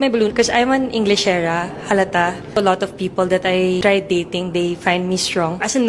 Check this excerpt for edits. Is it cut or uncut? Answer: uncut